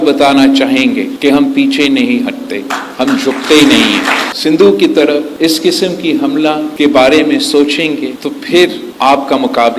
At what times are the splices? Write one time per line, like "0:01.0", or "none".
0:04.3
0:08.9